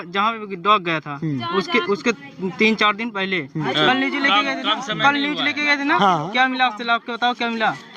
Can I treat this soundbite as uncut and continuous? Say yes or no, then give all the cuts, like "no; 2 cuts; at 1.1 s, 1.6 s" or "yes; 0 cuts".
no; 1 cut; at 3.6 s